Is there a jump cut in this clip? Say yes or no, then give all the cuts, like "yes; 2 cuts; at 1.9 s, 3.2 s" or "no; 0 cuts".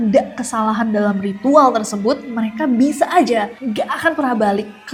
no; 0 cuts